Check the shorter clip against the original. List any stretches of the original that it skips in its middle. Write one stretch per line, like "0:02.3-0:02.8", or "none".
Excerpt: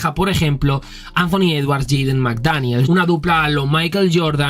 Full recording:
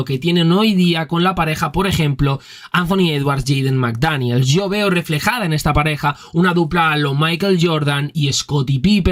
0:04.4-0:06.3